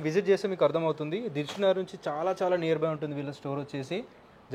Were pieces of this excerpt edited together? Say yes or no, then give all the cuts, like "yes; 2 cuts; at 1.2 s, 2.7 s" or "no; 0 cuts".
no; 0 cuts